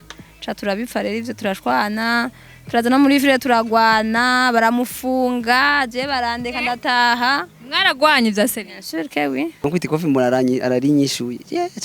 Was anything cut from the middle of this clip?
yes; 1 cut; at 9.6 s

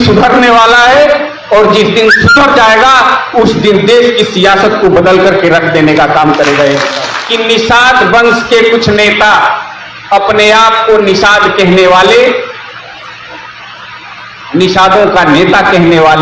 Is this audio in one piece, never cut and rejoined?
no; 1 cut; at 7.1 s

